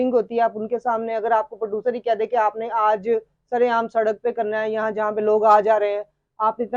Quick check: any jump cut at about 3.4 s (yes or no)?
no